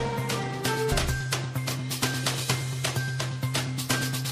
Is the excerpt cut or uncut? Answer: cut